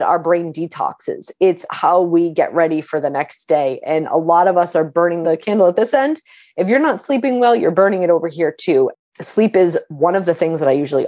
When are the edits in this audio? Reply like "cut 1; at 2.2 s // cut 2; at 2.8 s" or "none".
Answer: cut 1; at 5.2 s // cut 2; at 9.0 s

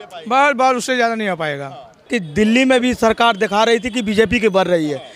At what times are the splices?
cut 1; at 2.1 s

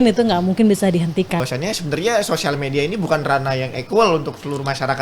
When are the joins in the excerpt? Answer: cut 1; at 1.4 s

